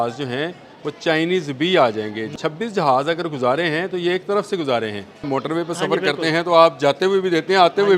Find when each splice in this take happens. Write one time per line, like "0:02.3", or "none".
0:02.3
0:05.3